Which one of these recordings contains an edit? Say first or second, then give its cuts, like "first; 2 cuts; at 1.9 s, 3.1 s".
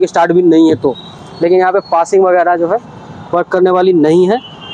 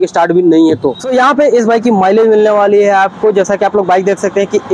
second; 1 cut; at 1.0 s